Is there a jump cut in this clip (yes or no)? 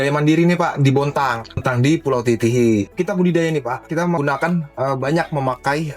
yes